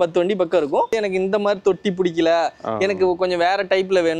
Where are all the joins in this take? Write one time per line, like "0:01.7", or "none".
0:01.0